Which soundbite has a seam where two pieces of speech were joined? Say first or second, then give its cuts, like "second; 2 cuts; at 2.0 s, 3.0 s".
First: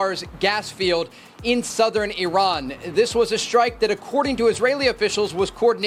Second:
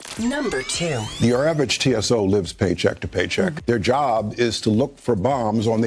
second; 1 cut; at 1.1 s